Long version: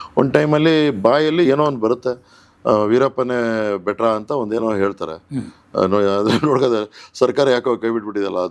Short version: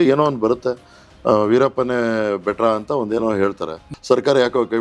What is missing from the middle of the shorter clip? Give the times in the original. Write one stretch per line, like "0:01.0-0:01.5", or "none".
0:05.3-0:07.0